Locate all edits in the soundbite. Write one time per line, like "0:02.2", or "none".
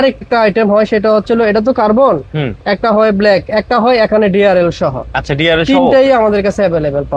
none